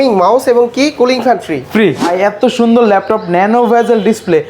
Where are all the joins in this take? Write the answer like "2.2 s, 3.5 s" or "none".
2.1 s